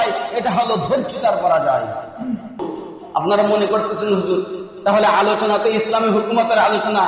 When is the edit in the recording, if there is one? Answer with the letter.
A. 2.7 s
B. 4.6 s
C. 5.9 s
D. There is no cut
A